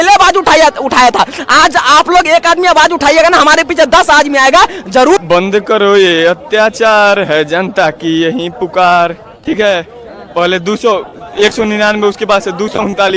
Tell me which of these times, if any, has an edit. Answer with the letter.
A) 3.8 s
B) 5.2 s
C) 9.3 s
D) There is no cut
B